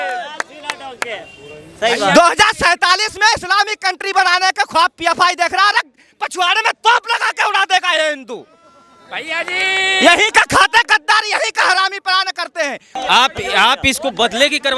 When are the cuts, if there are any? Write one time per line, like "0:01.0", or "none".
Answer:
0:12.9

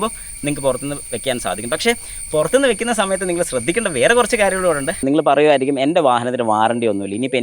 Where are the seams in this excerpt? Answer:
0:05.0

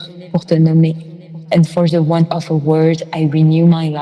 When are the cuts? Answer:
0:01.1

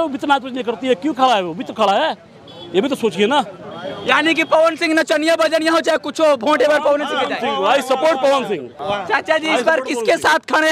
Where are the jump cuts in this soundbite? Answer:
0:08.7

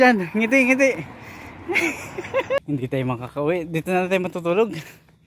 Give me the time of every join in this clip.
0:02.6

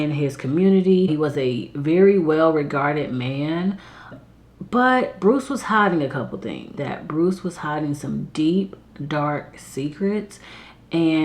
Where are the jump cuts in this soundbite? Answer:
0:01.1
0:04.2
0:06.8

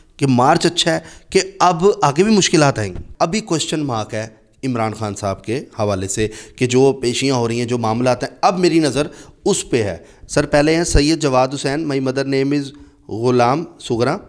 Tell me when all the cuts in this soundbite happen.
0:03.0
0:10.1

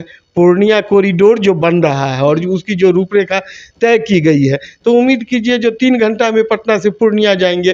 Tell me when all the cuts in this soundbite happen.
none

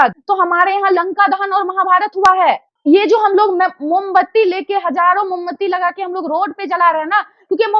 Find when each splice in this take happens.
none

